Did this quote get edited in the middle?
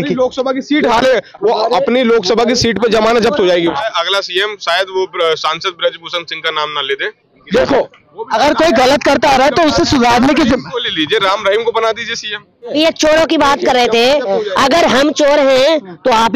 yes; 3 cuts; at 3.9 s, 7.3 s, 12.7 s

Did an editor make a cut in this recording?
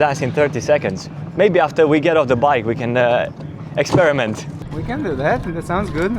no; 0 cuts

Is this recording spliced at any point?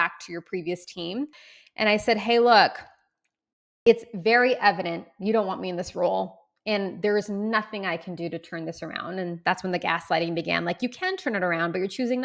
yes; 1 cut; at 1.4 s

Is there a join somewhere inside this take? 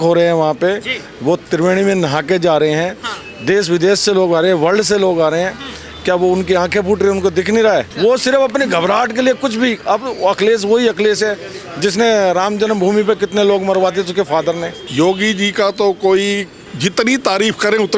yes; 3 cuts; at 7.9 s, 14.8 s, 16.6 s

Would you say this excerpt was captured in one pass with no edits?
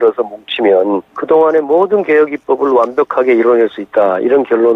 no; 1 cut; at 1.1 s

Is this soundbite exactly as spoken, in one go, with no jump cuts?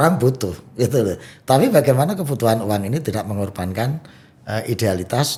yes; 0 cuts

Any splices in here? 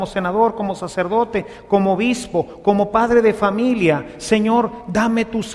no; 0 cuts

